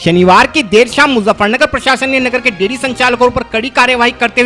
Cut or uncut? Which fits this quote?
uncut